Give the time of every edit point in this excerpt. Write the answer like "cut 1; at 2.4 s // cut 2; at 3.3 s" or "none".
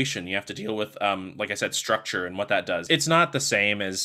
cut 1; at 2.8 s